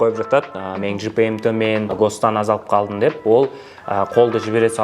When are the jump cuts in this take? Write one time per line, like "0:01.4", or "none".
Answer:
0:01.9